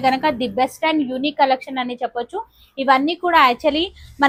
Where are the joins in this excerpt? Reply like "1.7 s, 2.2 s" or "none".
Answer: none